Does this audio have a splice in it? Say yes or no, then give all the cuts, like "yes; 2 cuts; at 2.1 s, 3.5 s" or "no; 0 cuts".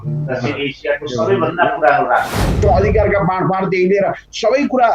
yes; 1 cut; at 2.6 s